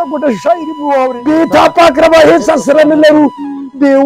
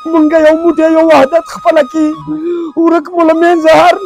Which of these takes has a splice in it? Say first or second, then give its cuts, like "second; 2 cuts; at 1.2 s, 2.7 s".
first; 1 cut; at 1.2 s